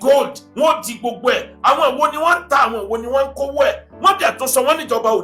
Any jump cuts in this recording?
no; 0 cuts

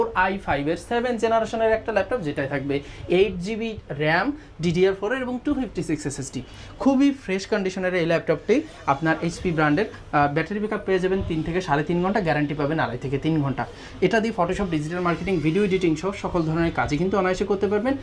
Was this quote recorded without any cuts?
yes; 0 cuts

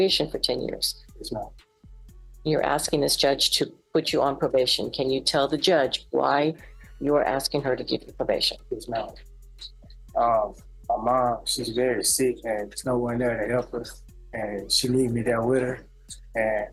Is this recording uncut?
yes; 0 cuts

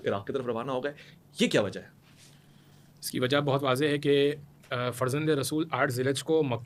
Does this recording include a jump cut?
no; 0 cuts

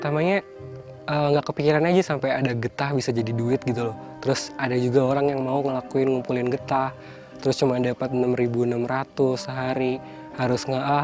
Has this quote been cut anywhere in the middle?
no; 0 cuts

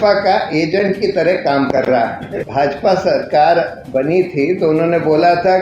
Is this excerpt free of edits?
no; 1 cut; at 2.4 s

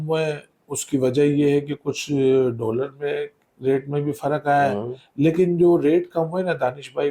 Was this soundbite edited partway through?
no; 0 cuts

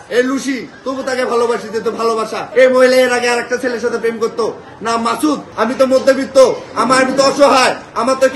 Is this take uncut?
no; 1 cut; at 5.5 s

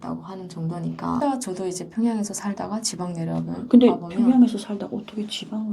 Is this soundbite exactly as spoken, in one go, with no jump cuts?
no; 1 cut; at 1.2 s

